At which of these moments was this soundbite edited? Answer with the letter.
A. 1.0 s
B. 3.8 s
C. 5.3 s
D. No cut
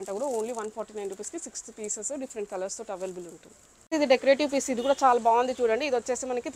B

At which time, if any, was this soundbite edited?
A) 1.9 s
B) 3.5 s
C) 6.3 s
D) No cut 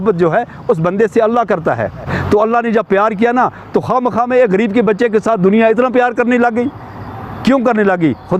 D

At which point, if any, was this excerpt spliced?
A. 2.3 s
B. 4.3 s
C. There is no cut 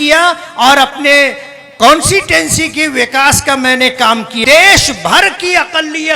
B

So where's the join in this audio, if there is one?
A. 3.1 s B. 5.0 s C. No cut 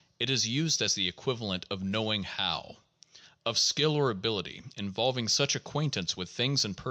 C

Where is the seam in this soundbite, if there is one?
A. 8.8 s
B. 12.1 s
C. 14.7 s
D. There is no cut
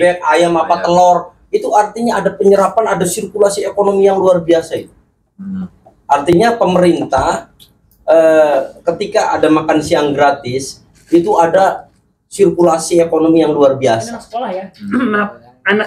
C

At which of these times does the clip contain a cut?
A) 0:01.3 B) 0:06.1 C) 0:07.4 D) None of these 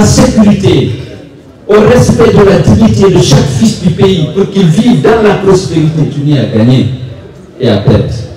B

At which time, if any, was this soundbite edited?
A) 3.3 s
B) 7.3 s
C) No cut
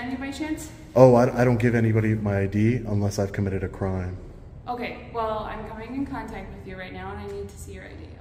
C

